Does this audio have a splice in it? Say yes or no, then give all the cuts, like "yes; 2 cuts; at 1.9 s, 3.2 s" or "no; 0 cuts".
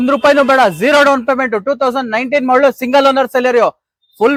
no; 0 cuts